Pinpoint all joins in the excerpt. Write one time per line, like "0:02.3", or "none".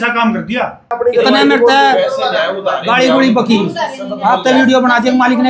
0:01.0

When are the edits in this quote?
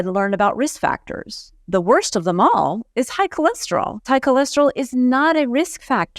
0:01.6
0:04.1

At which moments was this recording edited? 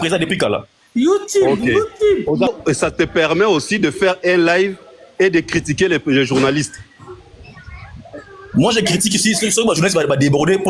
0:02.5

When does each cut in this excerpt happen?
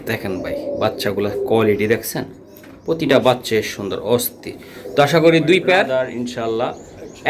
0:06.1

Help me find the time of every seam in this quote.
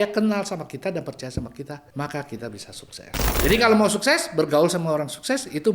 0:01.8
0:03.4

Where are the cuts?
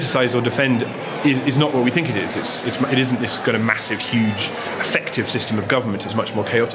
0:01.0
0:04.6

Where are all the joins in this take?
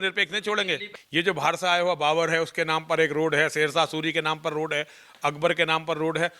0:00.9

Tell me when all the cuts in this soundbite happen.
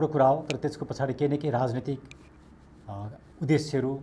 none

